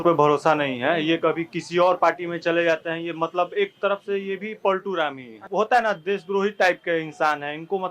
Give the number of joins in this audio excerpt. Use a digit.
1